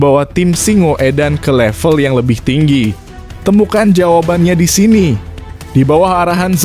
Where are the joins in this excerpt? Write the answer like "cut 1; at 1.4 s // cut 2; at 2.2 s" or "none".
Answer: none